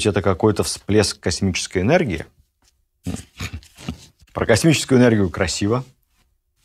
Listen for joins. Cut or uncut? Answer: cut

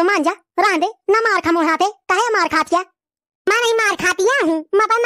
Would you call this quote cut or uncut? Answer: uncut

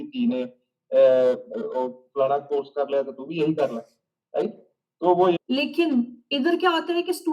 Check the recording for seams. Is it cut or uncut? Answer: cut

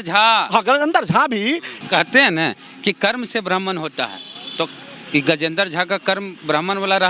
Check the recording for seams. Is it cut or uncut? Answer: cut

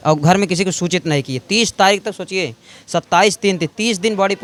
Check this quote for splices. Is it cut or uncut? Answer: uncut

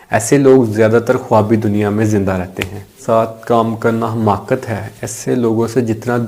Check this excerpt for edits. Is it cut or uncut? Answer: cut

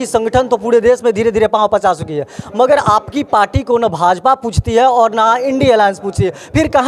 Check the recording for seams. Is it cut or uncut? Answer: uncut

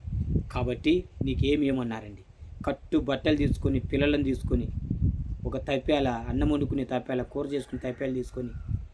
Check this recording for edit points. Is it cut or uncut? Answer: uncut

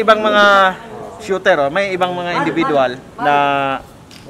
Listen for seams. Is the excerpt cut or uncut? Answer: cut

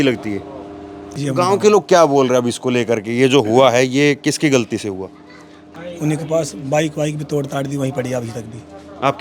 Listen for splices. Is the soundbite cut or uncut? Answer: cut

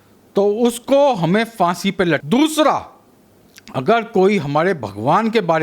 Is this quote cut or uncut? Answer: cut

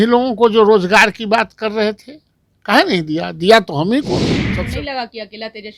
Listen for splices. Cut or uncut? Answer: cut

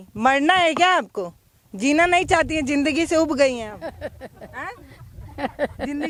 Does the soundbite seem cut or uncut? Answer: uncut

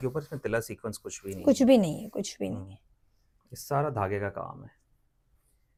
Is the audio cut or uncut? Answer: uncut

